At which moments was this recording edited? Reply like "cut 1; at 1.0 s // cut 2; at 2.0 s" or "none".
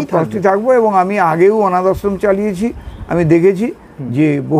none